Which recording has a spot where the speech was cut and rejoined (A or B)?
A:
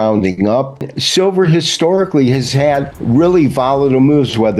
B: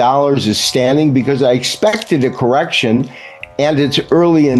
A